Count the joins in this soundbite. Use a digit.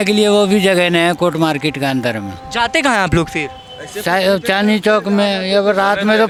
0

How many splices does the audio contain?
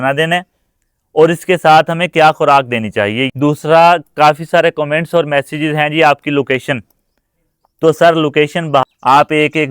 2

